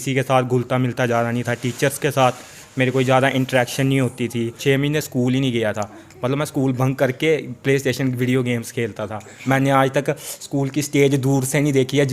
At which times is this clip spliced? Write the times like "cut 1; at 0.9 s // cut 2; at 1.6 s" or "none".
cut 1; at 4.6 s // cut 2; at 9.3 s